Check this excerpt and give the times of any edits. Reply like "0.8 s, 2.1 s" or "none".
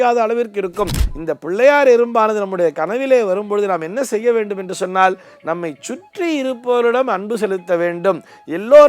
1.0 s